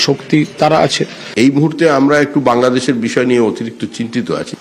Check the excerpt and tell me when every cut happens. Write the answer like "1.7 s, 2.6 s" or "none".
1.2 s